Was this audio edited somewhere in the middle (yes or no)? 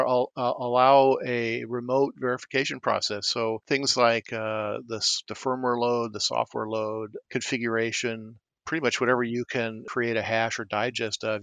yes